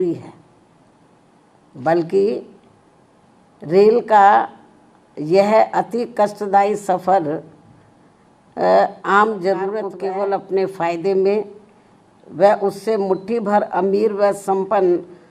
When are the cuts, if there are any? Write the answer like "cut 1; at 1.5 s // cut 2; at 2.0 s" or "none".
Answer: cut 1; at 9.9 s